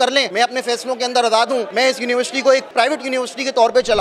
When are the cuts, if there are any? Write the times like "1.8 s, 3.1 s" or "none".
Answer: 2.7 s